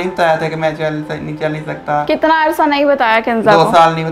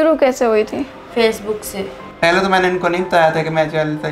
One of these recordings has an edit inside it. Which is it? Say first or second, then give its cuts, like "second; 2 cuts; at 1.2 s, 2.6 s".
second; 1 cut; at 2.0 s